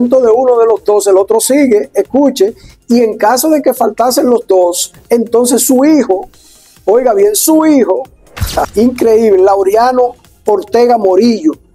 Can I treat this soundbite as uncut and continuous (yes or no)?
no